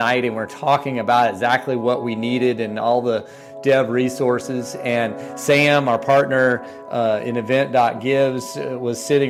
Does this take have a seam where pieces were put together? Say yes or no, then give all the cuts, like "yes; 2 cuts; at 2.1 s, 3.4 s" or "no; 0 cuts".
no; 0 cuts